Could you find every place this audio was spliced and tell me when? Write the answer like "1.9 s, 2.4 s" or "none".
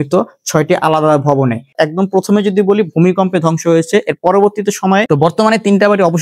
1.7 s, 5.1 s